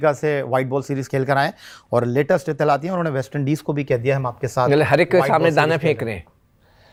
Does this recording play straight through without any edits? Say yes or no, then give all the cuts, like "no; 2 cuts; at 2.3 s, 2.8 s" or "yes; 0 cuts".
yes; 0 cuts